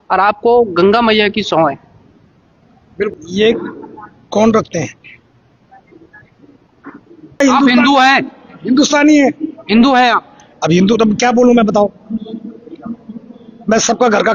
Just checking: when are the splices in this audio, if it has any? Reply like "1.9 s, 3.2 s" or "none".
3.1 s, 7.4 s

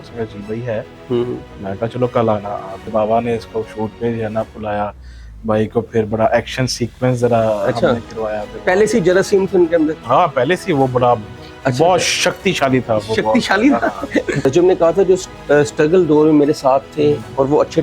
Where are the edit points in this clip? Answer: 2.9 s, 14.4 s

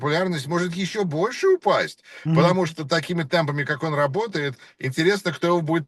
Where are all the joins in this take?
none

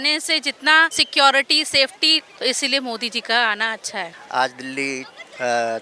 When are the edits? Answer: 1.0 s, 2.3 s, 4.2 s

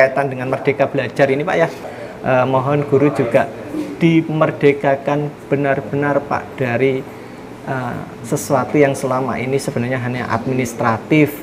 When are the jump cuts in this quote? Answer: 1.8 s

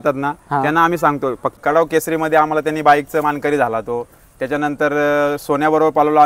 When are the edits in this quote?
1.6 s

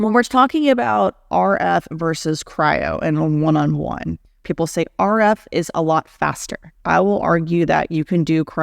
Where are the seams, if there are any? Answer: 4.4 s, 6.7 s

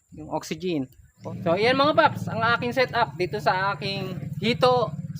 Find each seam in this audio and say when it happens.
1.1 s, 4.2 s

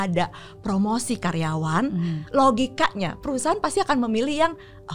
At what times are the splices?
none

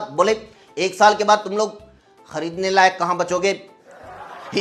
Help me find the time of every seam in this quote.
none

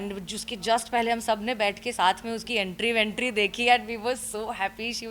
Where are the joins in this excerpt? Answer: none

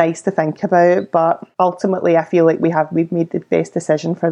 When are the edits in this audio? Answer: 1.5 s

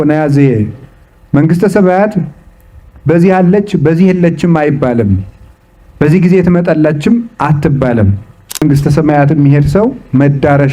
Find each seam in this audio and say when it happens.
8.6 s

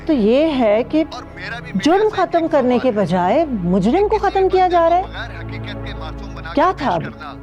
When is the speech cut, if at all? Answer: none

